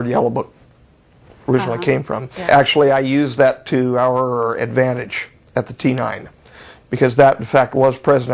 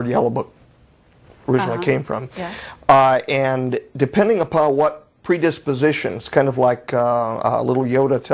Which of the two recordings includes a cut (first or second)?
first